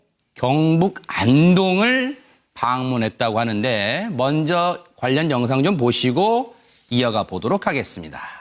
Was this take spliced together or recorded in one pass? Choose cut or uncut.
uncut